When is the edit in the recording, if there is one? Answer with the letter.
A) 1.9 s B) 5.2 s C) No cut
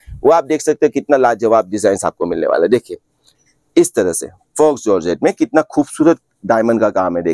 C